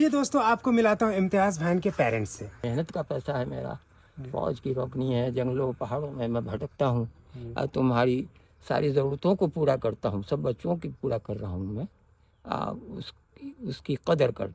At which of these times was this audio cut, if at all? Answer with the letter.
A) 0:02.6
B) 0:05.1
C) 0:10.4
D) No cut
A